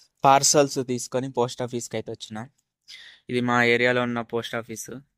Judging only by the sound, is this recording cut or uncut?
uncut